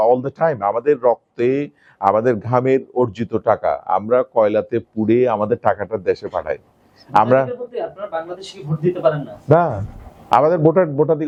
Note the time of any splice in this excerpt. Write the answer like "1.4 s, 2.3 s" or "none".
none

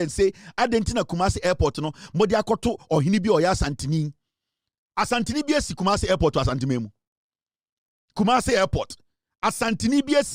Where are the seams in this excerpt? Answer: none

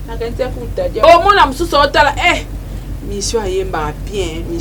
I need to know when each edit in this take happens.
1.0 s

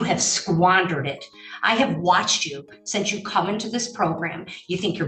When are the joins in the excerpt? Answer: none

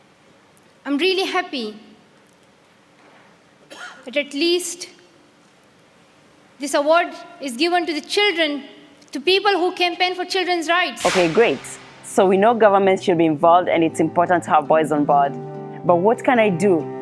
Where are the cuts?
10.9 s

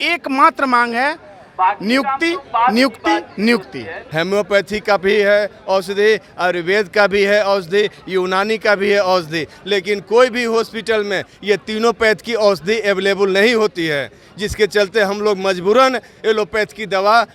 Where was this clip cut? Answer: 4.0 s

